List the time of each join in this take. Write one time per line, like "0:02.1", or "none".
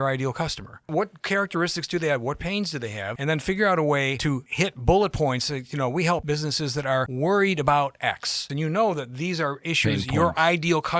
0:00.9
0:03.1
0:04.4
0:06.6
0:08.5